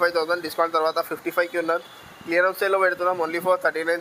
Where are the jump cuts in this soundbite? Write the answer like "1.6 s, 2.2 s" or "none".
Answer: none

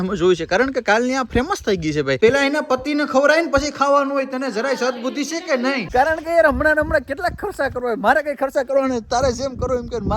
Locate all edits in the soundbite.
2.2 s, 5.8 s

